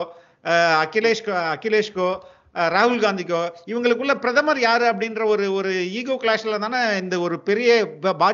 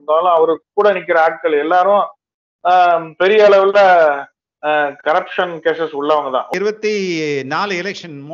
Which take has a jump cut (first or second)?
second